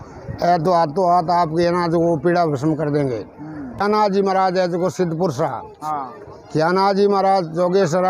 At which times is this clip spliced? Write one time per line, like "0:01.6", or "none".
0:03.8